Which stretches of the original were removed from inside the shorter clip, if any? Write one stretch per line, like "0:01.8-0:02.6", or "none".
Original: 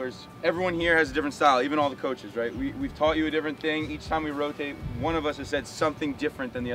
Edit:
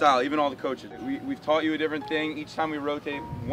0:02.3-0:02.5